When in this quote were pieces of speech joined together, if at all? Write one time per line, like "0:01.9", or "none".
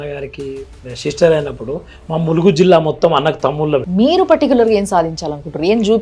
0:03.9